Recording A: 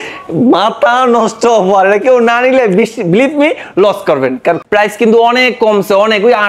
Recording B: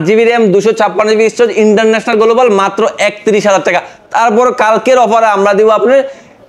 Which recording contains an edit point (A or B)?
A